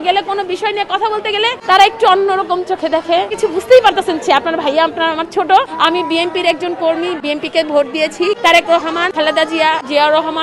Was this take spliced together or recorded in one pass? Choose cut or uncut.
cut